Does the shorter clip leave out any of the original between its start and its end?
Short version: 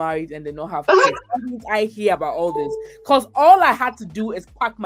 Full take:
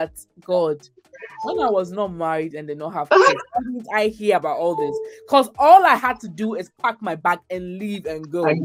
no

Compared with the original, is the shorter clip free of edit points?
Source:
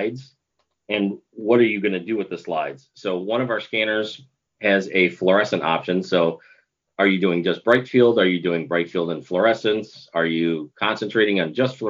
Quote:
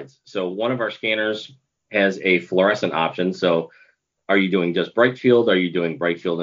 yes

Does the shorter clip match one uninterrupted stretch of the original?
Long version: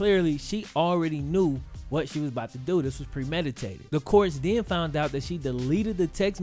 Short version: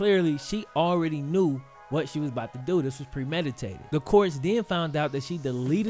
yes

